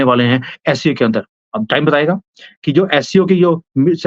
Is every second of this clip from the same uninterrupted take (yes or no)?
yes